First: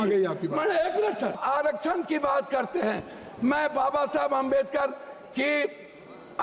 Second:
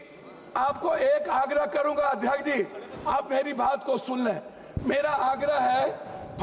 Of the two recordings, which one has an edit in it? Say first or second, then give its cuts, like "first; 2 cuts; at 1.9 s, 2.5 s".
first; 1 cut; at 1.4 s